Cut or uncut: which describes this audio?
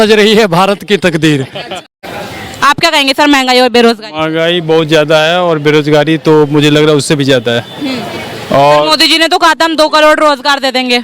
cut